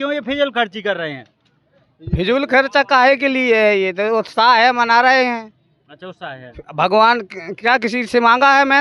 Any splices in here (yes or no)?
no